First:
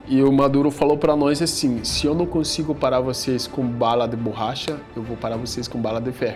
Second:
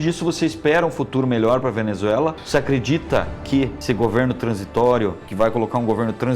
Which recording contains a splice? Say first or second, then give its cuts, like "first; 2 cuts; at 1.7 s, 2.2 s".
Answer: second; 3 cuts; at 2.4 s, 3.8 s, 5.2 s